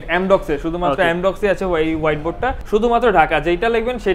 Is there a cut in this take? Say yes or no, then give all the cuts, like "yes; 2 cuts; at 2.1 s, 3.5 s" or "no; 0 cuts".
yes; 1 cut; at 2.6 s